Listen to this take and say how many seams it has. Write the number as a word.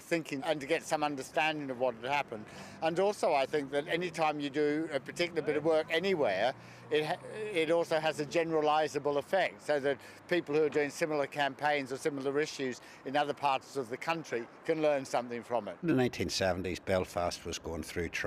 one